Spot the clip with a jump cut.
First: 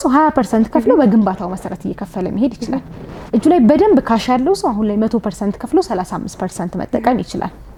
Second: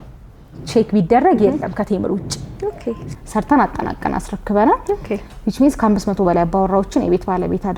second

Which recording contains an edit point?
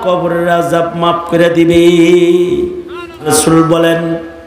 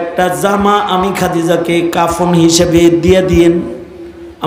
first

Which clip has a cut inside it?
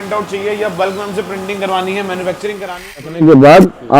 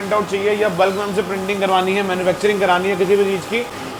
first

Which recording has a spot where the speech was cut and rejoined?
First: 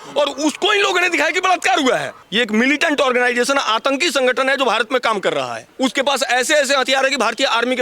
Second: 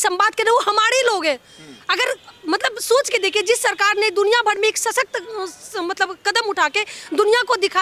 first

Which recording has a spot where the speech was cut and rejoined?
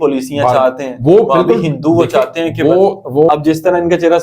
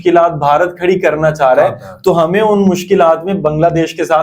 first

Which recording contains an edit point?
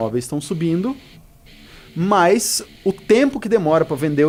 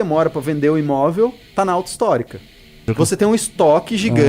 second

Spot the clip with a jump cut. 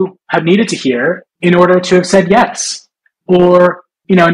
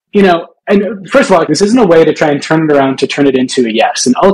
second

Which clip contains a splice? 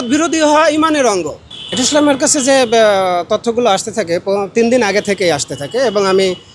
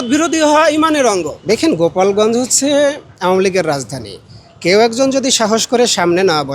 second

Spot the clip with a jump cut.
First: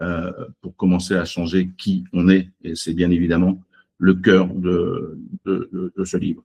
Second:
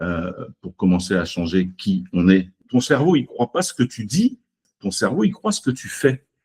second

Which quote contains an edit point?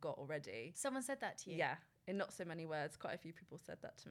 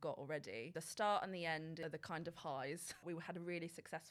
second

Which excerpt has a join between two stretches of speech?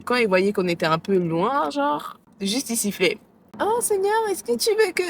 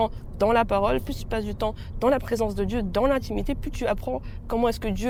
first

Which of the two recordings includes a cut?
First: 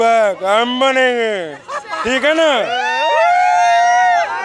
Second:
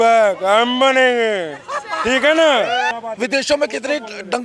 second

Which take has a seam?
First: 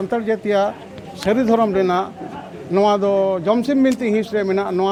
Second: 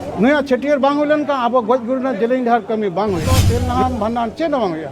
second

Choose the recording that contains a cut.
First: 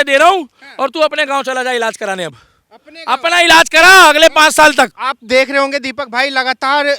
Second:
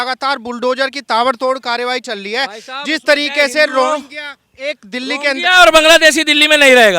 first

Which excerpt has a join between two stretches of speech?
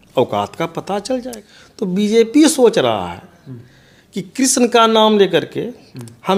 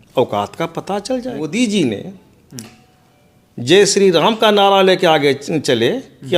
second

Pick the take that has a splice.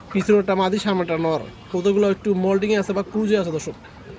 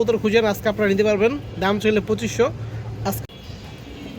second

